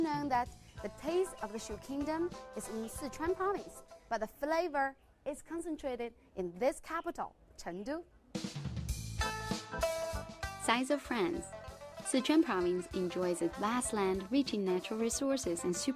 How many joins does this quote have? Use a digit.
1